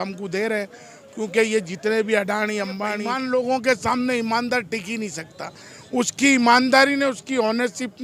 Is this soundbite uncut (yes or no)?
no